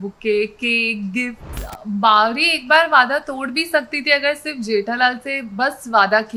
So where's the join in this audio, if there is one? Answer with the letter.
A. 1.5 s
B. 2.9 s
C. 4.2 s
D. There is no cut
A